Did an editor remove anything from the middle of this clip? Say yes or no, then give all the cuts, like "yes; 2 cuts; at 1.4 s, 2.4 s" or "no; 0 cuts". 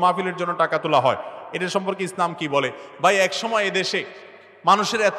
no; 0 cuts